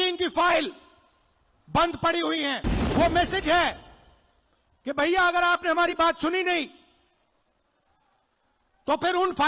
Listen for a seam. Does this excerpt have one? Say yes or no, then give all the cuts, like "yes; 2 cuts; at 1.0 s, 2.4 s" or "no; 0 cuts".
yes; 1 cut; at 2.7 s